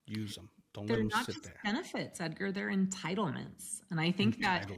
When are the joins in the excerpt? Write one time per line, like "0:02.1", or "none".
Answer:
none